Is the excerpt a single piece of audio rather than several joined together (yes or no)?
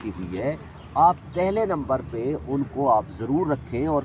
yes